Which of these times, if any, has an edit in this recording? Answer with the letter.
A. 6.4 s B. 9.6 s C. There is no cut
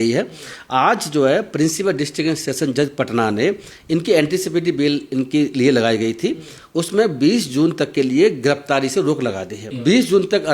B